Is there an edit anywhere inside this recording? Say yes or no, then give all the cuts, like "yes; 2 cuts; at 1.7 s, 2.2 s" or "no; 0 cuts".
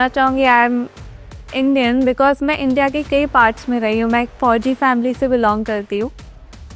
no; 0 cuts